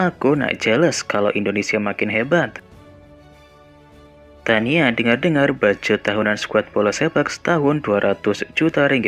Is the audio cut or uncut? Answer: uncut